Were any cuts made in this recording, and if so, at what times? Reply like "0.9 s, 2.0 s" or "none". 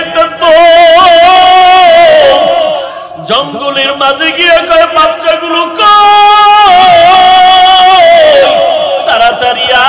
2.9 s